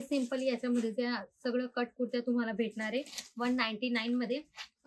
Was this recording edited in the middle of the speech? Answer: no; 0 cuts

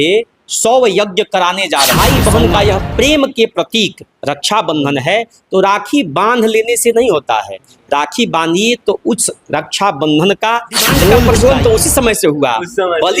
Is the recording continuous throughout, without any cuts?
no; 2 cuts; at 1.9 s, 11.3 s

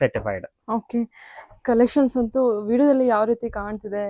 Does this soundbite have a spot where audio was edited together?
no; 0 cuts

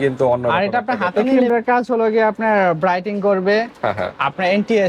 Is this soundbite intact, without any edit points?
no; 1 cut; at 1.2 s

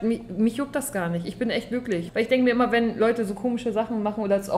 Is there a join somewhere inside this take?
yes; 1 cut; at 2.0 s

